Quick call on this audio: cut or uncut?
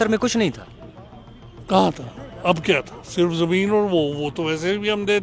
uncut